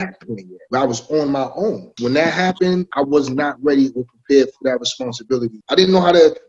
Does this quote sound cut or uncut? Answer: cut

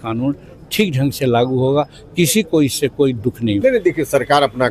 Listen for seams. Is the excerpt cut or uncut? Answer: cut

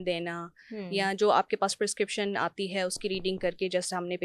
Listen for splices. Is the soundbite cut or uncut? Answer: uncut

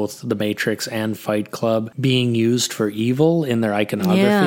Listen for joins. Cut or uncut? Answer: uncut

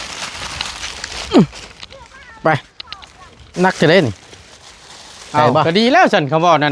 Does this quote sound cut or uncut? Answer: cut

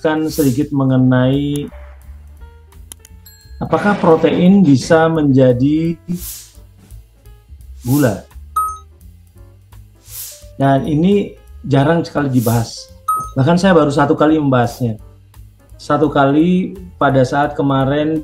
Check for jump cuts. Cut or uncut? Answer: uncut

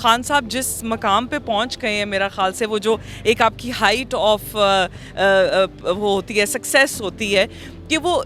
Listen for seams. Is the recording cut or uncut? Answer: uncut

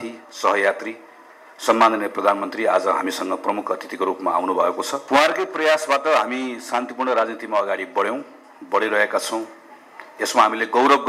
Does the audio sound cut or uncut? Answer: cut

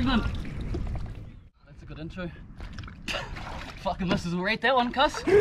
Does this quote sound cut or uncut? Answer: cut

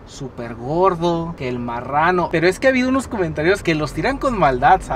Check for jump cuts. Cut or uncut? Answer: uncut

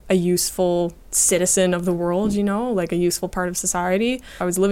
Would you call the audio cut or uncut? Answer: cut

